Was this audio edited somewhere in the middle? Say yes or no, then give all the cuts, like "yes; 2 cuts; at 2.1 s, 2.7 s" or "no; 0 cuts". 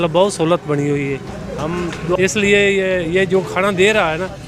yes; 1 cut; at 2.2 s